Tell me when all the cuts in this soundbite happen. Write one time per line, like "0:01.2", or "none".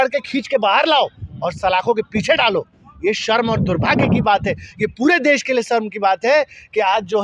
none